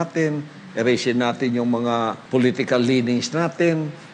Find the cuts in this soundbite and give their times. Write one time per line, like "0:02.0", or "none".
0:02.2